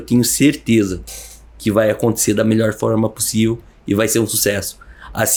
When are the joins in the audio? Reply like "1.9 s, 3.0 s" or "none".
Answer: none